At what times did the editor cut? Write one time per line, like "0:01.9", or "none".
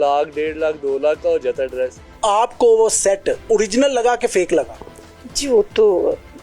0:02.0
0:03.5